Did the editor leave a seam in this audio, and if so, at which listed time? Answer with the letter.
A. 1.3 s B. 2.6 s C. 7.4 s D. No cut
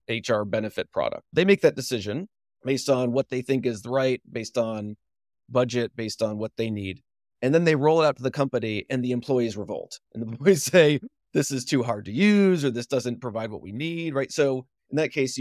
A